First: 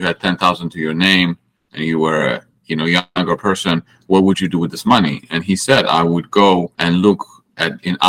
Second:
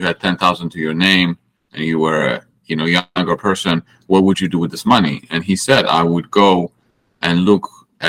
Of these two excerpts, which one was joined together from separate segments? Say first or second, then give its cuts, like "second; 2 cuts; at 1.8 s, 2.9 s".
first; 1 cut; at 6.7 s